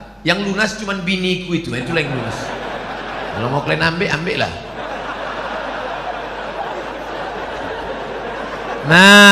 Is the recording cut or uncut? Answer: cut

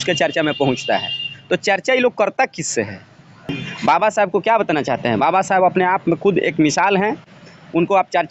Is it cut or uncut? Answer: cut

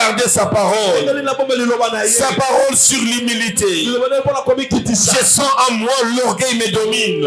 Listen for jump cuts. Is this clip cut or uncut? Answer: uncut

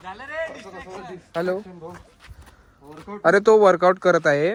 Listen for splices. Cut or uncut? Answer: uncut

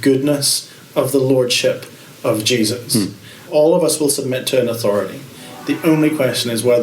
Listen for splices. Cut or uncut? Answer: cut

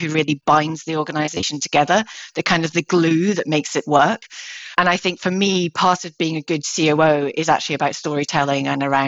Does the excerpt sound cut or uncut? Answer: uncut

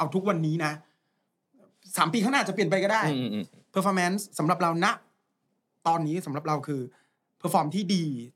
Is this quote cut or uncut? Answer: uncut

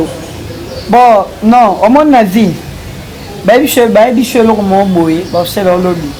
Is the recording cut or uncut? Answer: uncut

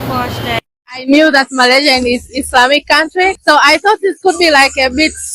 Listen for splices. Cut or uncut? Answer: cut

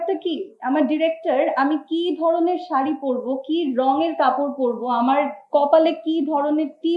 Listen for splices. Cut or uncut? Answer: uncut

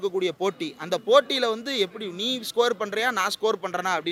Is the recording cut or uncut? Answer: uncut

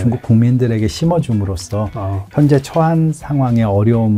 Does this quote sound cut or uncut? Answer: uncut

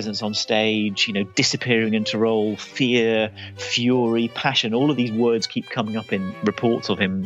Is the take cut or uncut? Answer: cut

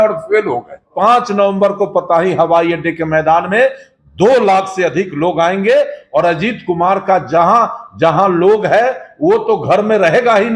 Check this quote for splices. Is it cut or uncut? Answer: cut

